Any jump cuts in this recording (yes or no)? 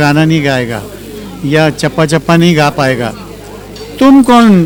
no